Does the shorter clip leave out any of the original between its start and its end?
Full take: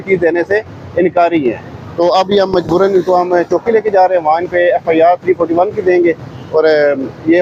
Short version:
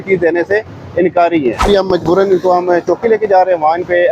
yes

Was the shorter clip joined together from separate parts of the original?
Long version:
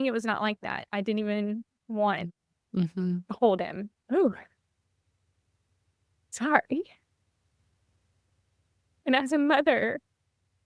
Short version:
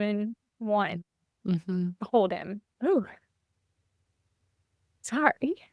no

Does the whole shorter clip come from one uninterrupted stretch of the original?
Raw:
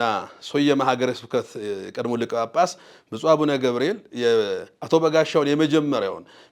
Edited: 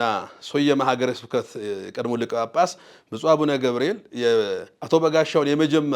yes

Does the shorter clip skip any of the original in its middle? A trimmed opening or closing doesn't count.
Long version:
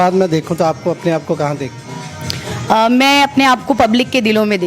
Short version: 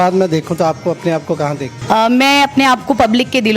yes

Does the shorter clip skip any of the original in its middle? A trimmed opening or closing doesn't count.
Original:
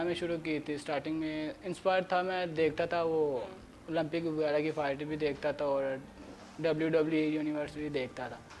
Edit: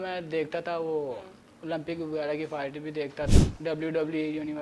yes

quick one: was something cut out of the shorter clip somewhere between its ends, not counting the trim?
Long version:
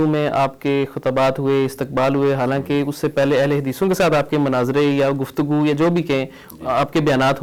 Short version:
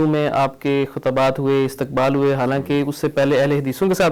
no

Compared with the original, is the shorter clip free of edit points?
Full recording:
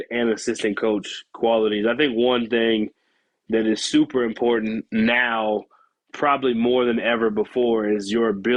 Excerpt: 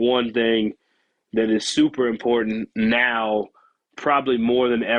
yes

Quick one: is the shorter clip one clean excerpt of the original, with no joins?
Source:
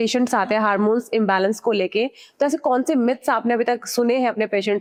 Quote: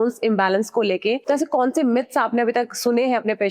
no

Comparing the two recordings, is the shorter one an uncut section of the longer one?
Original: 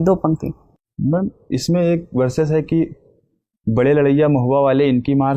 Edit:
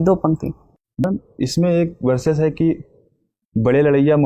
no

